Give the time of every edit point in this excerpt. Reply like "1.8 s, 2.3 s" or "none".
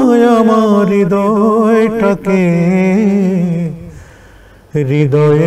none